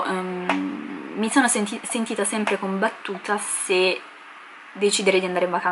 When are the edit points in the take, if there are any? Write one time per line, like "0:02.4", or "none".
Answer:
none

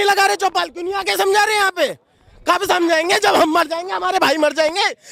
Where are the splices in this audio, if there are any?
none

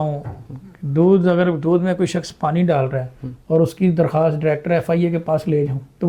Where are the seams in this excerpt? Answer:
none

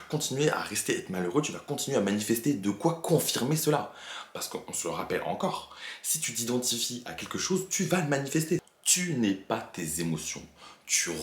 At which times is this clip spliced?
0:08.8

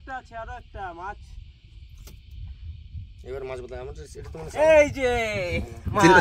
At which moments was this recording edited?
none

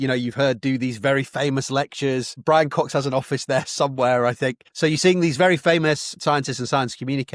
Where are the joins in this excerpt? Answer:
0:02.4
0:04.6
0:06.1

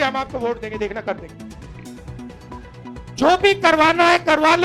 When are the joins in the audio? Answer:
none

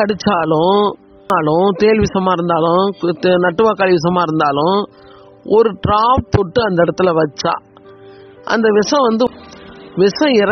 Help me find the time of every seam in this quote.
0:01.3
0:09.3

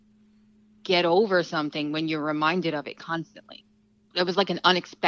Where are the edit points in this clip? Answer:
0:04.0

